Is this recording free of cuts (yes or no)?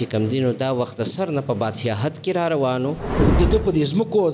no